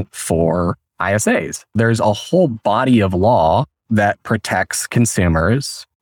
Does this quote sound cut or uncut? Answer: cut